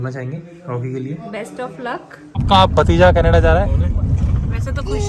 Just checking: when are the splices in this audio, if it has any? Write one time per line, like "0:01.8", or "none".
0:02.4

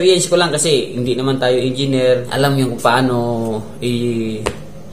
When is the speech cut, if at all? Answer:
0:02.3

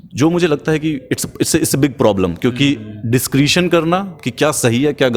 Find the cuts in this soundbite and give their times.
none

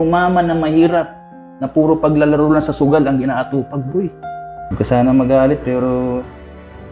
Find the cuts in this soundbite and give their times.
0:04.6

